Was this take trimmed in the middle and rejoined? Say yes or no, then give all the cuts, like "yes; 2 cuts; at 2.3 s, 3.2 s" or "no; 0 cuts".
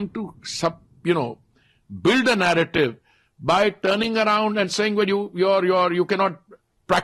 no; 0 cuts